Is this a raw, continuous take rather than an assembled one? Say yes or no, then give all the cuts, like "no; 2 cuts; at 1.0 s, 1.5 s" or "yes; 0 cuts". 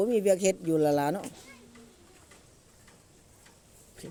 yes; 0 cuts